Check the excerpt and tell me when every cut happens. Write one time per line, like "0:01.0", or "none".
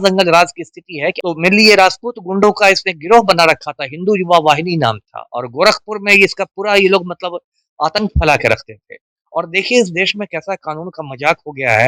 0:01.2